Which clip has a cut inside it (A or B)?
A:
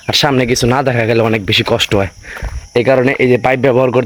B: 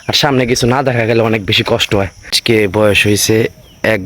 B